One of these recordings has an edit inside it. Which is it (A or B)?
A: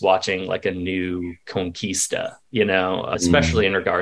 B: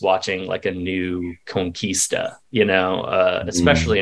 A